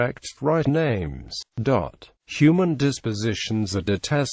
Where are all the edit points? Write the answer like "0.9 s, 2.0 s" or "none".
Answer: none